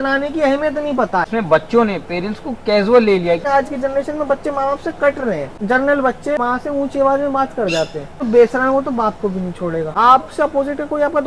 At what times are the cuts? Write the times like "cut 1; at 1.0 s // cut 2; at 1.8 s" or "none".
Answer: cut 1; at 1.3 s // cut 2; at 3.4 s // cut 3; at 5.5 s // cut 4; at 6.4 s // cut 5; at 8.2 s // cut 6; at 9.9 s